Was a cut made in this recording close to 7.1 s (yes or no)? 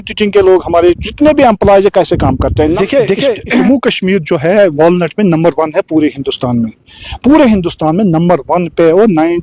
no